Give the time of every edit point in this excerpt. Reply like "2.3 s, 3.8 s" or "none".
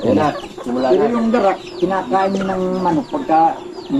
none

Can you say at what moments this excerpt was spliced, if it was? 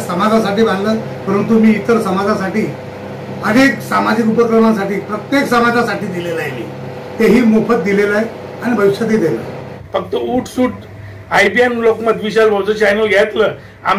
9.7 s

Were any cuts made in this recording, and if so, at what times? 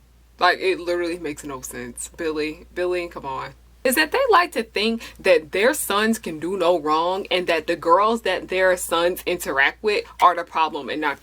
3.7 s

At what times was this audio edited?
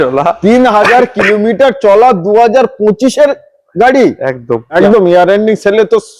4.7 s

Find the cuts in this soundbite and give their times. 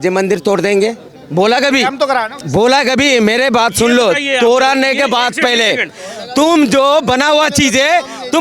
none

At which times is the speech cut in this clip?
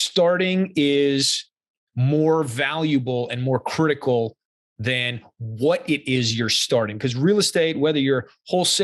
none

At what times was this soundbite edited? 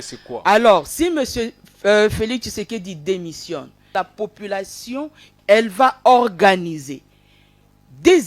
3.9 s, 5.3 s

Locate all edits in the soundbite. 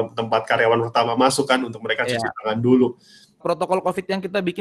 3.4 s

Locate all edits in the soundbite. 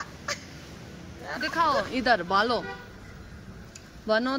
1.5 s

